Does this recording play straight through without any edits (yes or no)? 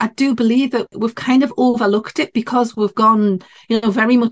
no